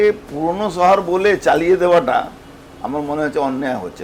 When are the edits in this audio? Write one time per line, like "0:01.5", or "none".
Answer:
none